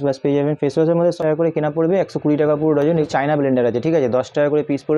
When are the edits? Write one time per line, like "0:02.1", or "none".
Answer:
0:01.2
0:03.1